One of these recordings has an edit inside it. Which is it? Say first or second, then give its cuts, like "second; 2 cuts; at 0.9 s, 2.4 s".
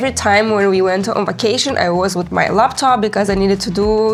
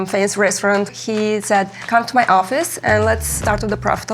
second; 3 cuts; at 0.9 s, 1.8 s, 3.4 s